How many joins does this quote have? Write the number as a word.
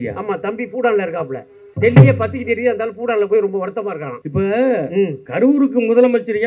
three